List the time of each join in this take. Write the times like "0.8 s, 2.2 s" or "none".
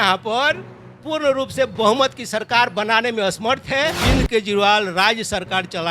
4.0 s